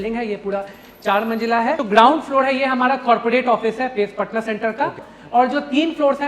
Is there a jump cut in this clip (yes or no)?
yes